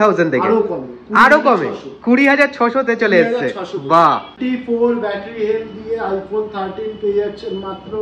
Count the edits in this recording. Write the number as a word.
one